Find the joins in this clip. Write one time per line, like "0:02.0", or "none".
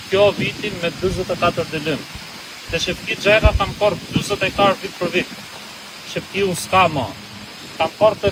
none